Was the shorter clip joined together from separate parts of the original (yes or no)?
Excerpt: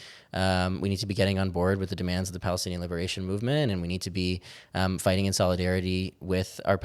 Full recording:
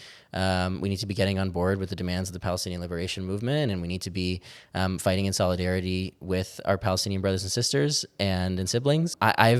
no